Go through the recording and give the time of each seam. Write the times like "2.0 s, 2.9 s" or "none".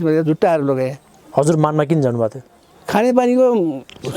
none

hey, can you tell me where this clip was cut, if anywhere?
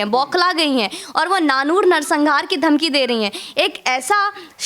none

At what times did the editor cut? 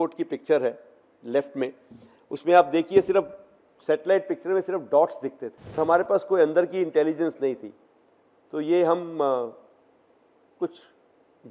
5.8 s

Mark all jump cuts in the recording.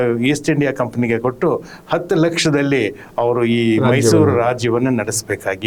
none

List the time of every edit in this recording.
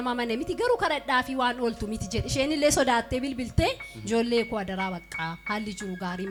none

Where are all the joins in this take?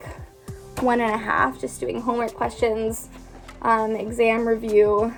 none

